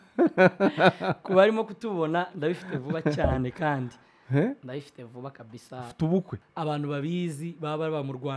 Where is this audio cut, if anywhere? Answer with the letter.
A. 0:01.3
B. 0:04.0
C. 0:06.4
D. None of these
C